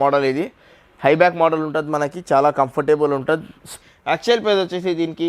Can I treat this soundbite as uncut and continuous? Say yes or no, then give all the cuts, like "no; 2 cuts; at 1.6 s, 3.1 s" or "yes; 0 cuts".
no; 1 cut; at 3.6 s